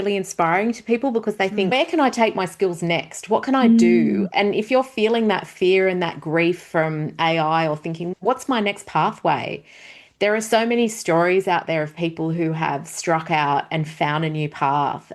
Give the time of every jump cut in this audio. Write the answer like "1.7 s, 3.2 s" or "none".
1.7 s, 8.0 s

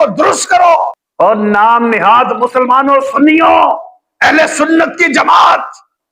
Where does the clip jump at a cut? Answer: 1.0 s

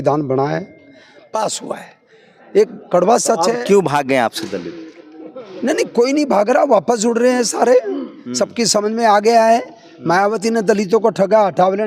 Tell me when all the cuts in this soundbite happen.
none

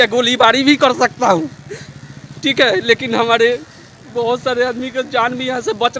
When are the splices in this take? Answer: none

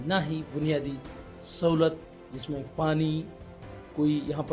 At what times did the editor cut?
none

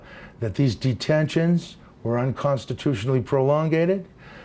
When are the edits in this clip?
none

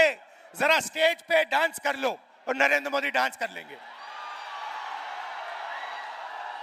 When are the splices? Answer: none

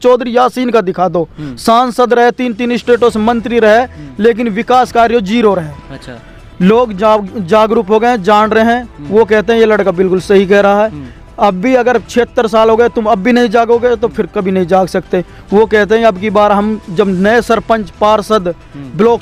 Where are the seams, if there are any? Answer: none

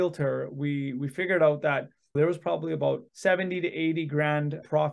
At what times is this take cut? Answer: 2.1 s, 3.1 s

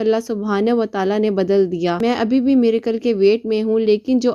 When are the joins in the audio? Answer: 2.0 s

